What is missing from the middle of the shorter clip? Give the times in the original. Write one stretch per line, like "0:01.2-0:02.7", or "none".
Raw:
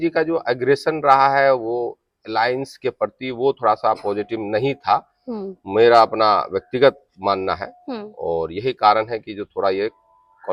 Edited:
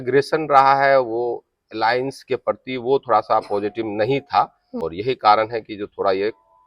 0:05.4-0:08.4